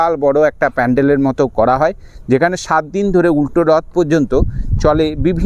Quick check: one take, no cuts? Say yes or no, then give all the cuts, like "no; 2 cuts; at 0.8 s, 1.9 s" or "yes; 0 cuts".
yes; 0 cuts